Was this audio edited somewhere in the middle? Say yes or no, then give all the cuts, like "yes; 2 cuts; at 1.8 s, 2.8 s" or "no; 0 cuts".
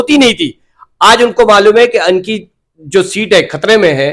no; 0 cuts